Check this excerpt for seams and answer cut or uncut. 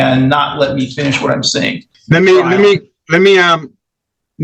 cut